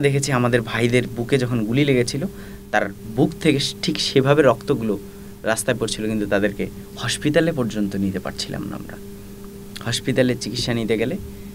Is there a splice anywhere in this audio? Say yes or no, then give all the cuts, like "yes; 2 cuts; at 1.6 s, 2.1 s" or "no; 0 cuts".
no; 0 cuts